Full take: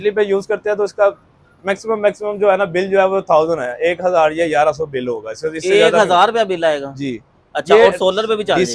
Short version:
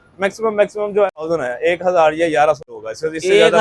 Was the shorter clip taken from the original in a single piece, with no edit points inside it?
no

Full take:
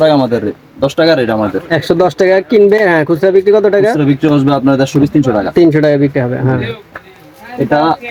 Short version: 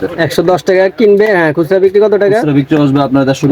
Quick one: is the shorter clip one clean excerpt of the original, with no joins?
yes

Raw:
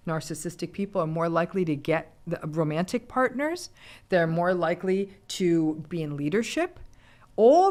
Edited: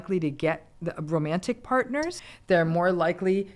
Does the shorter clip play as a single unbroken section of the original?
no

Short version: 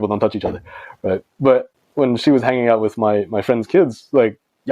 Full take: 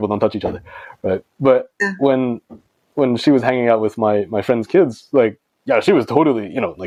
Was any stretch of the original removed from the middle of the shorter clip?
yes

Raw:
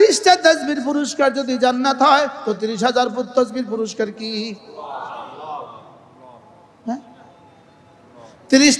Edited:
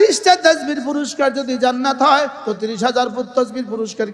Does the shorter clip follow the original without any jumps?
yes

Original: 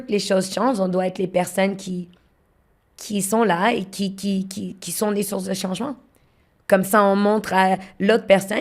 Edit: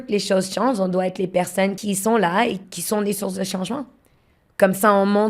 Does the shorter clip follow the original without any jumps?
no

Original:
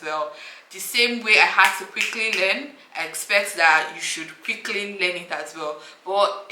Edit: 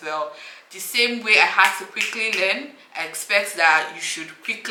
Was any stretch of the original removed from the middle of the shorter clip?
no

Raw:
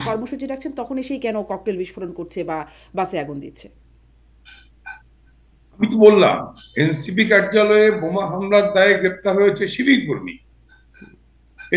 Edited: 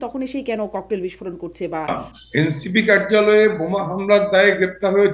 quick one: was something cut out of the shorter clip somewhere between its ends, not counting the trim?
yes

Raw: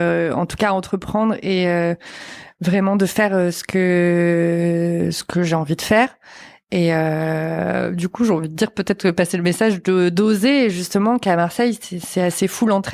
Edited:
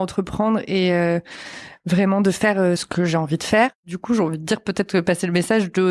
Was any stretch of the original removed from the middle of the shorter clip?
yes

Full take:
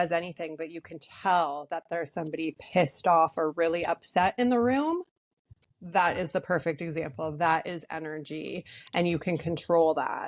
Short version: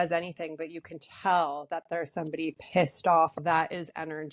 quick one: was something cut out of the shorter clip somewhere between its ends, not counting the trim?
yes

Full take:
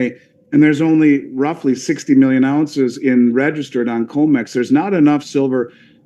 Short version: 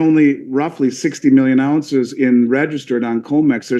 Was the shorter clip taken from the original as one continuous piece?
yes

